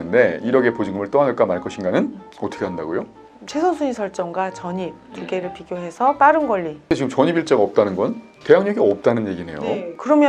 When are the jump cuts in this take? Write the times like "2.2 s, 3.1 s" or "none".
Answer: 6.8 s